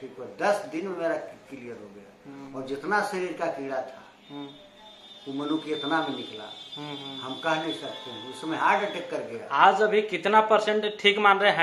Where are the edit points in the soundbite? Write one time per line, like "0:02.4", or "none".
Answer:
none